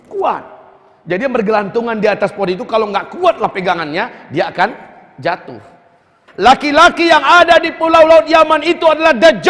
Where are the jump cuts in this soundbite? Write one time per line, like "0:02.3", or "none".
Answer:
0:06.2